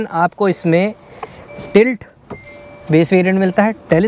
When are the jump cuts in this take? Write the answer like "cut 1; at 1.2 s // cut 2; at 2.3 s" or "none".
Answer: none